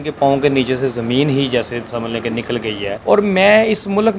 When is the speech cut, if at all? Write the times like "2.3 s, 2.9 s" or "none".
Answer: 2.9 s